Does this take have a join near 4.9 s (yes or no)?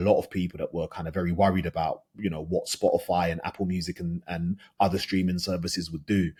no